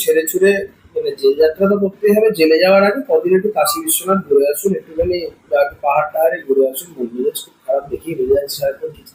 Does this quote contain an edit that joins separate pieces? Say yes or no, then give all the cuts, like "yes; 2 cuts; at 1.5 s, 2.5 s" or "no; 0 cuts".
no; 0 cuts